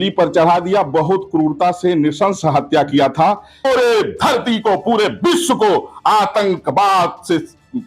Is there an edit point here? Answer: yes; 1 cut; at 3.7 s

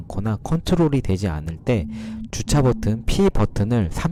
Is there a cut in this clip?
no; 0 cuts

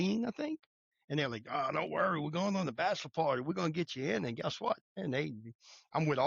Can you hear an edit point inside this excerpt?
yes; 1 cut; at 4.9 s

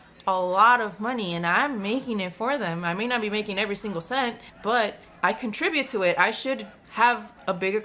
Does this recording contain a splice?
yes; 3 cuts; at 4.5 s, 5.0 s, 6.8 s

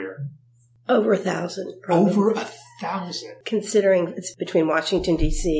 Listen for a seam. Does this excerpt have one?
yes; 2 cuts; at 3.3 s, 4.2 s

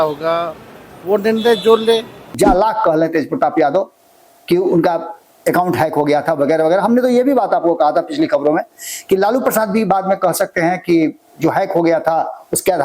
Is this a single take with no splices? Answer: no; 1 cut; at 2.3 s

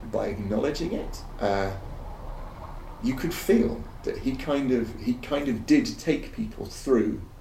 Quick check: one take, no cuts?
yes; 0 cuts

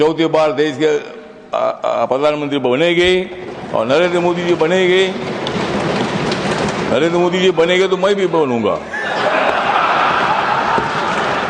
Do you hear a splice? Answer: no; 0 cuts

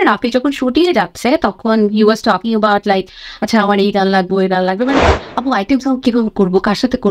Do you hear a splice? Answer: yes; 1 cut; at 5.1 s

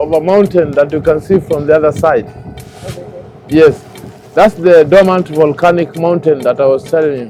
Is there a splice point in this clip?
no; 0 cuts

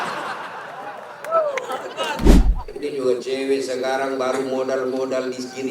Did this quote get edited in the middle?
yes; 1 cut; at 2.4 s

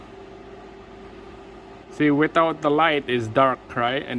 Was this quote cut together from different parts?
yes; 1 cut; at 1.8 s

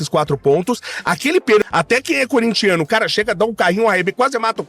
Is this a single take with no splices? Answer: no; 1 cut; at 1.6 s

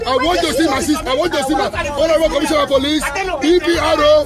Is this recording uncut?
no; 1 cut; at 1.0 s

